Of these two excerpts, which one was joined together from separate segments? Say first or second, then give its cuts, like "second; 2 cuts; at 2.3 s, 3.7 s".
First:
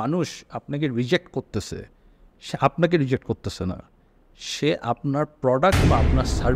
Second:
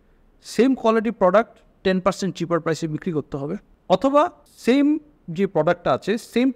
second; 2 cuts; at 3.7 s, 4.5 s